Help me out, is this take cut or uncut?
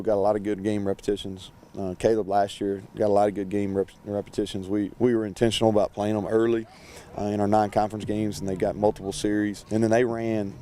cut